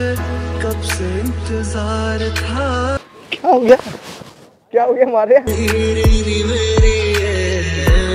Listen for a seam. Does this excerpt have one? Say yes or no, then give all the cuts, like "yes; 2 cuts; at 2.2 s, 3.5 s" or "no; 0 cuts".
no; 0 cuts